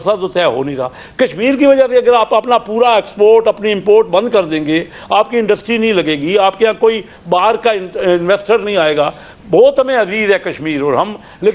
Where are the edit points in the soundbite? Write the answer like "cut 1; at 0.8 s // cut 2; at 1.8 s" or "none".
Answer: none

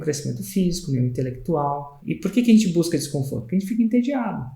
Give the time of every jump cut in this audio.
cut 1; at 1.9 s

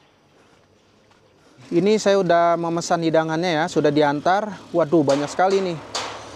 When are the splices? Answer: cut 1; at 1.6 s

